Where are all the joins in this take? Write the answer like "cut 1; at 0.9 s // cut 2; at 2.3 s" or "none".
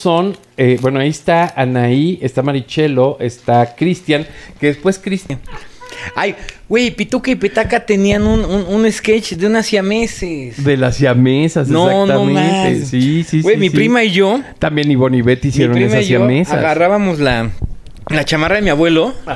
cut 1; at 5.3 s